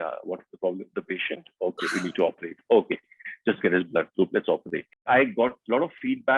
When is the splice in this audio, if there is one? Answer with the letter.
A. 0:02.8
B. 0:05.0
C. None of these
B